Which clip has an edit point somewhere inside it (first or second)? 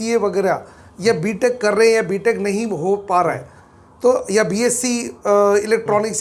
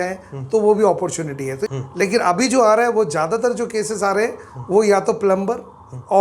second